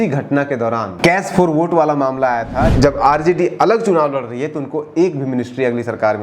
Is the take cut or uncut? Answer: cut